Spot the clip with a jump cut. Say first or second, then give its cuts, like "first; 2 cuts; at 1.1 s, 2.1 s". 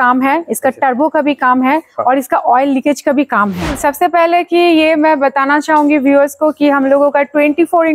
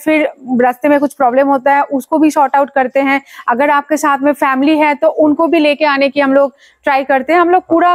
first; 1 cut; at 3.8 s